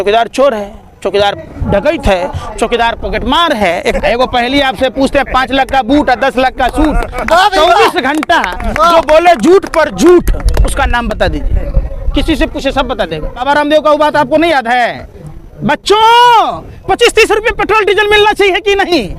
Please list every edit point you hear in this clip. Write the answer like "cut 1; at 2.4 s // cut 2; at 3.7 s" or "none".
cut 1; at 4.0 s // cut 2; at 13.4 s